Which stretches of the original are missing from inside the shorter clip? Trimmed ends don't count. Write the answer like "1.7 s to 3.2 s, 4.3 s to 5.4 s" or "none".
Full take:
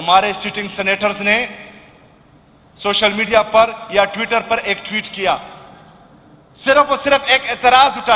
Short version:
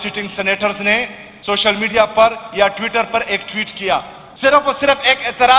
1.7 s to 2.6 s, 5.6 s to 6.4 s